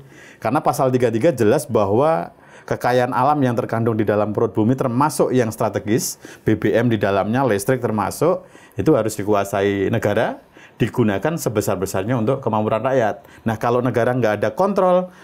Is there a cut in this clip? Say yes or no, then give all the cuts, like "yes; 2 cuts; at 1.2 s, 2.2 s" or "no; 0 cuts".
no; 0 cuts